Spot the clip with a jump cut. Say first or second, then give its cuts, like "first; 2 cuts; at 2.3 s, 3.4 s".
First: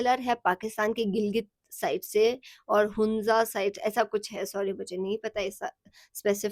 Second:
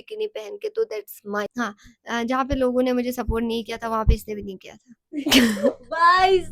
second; 1 cut; at 1.5 s